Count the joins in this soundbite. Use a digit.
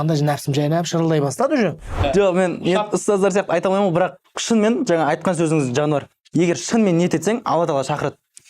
1